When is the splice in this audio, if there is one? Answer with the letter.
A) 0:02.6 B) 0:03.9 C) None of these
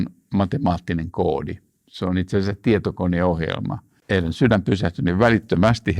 B